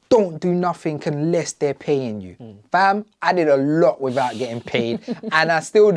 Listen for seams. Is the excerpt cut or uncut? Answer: uncut